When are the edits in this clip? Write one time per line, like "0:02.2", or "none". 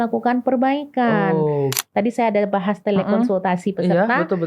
0:01.8